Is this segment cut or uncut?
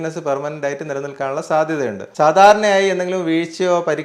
cut